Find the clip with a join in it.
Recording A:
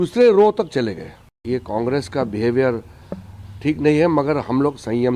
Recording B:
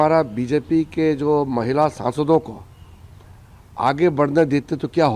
A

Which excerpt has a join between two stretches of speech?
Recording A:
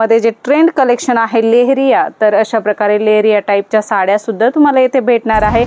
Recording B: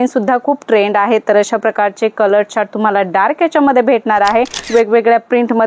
B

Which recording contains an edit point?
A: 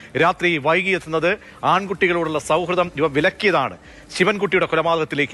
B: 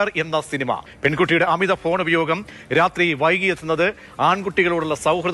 B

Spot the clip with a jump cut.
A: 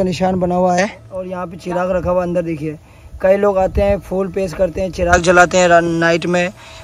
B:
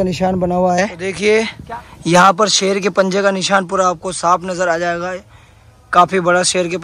A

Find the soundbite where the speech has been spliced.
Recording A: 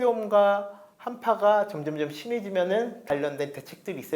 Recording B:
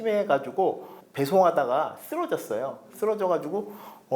B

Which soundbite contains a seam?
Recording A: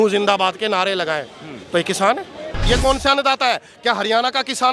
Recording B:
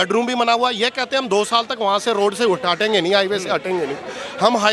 A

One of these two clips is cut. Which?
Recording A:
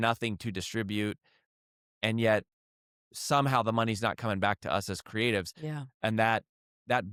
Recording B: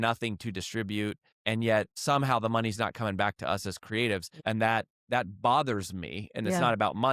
B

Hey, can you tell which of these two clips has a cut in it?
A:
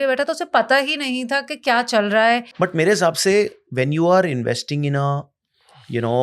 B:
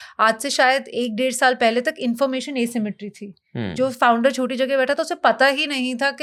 A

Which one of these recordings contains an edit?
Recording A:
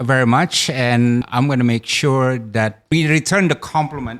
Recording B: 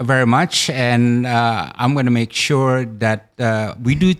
A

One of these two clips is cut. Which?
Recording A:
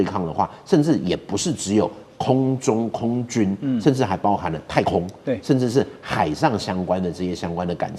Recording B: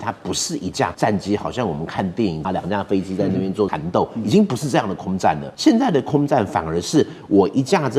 B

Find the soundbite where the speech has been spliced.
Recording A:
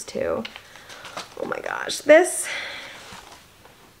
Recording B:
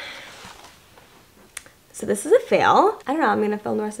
B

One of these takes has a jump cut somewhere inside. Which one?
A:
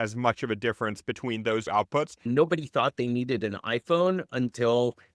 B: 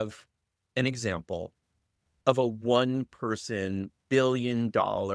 A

